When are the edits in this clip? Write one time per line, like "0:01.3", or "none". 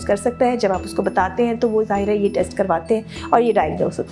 none